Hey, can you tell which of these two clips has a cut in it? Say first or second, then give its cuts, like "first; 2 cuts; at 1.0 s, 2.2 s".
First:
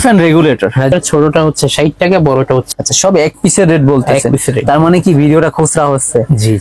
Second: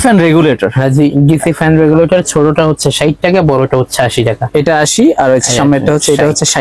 first; 2 cuts; at 0.9 s, 2.7 s